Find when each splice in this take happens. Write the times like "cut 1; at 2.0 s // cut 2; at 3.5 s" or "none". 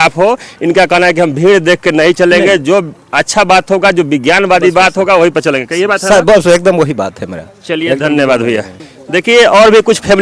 none